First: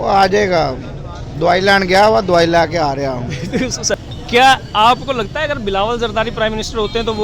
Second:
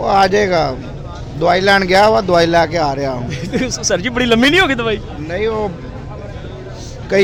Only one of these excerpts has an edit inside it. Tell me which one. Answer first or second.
first